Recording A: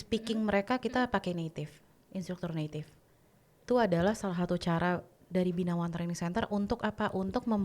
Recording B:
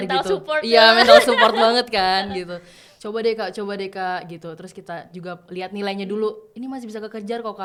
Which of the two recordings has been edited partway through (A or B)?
A